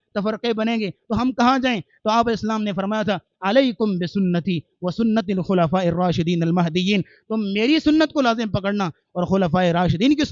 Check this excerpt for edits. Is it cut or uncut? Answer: uncut